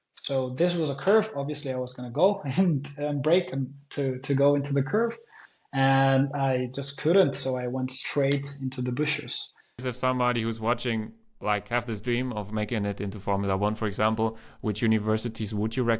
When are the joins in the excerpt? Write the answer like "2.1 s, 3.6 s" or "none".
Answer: 9.8 s